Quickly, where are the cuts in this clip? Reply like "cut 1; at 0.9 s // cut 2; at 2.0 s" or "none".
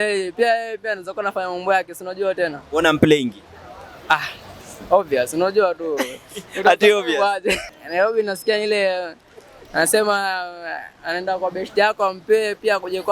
cut 1; at 7.6 s